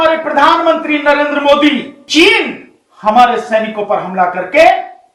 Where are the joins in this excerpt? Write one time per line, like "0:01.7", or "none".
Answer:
0:02.0